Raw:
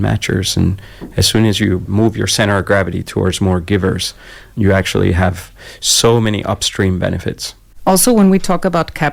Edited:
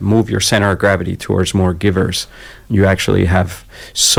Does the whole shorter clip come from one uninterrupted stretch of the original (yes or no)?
yes